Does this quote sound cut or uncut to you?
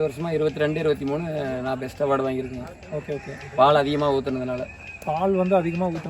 uncut